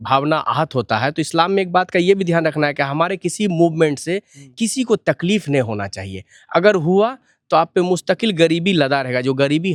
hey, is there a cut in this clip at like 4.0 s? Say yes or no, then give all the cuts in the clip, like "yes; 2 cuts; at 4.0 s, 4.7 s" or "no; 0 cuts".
no; 0 cuts